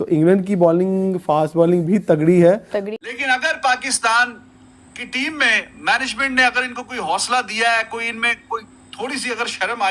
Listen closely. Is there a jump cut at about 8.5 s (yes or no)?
no